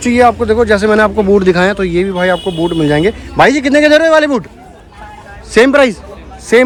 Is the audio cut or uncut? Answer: uncut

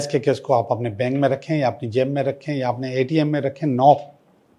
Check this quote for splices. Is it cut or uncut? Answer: uncut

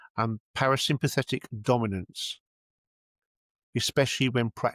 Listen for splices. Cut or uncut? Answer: uncut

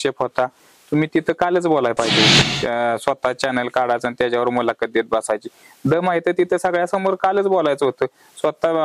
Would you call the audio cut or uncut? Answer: cut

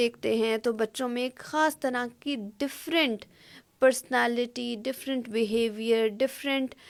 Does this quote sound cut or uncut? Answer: uncut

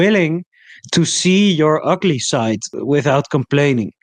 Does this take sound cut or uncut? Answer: cut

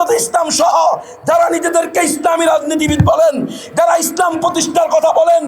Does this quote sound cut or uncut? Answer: uncut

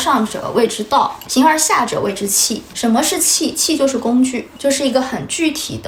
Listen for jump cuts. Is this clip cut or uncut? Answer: uncut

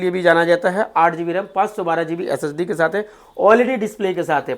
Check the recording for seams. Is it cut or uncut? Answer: uncut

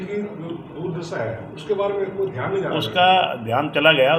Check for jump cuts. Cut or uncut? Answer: uncut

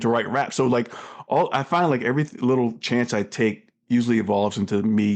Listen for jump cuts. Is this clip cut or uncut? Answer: uncut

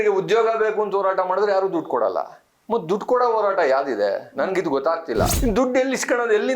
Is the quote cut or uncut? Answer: cut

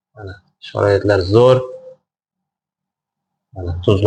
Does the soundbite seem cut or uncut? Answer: uncut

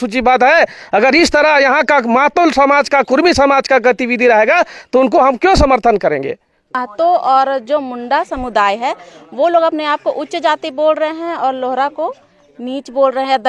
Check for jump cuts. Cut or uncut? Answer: cut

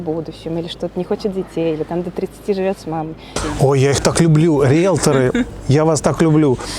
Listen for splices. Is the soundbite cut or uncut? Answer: cut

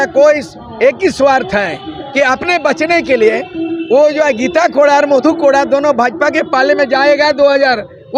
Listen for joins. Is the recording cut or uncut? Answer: uncut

